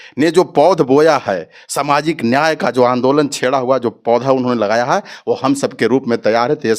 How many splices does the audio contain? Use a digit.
0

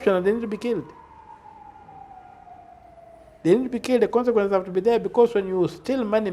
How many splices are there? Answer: 0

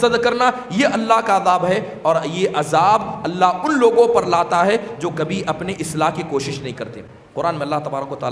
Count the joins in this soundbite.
0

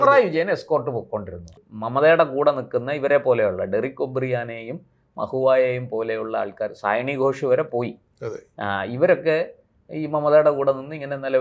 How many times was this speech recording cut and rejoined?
1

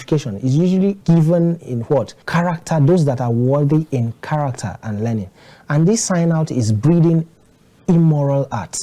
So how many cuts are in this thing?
1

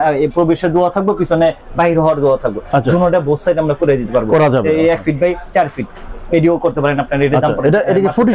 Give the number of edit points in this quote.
0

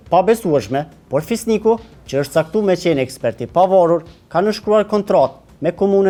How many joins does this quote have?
0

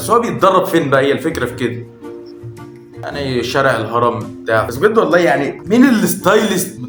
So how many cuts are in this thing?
0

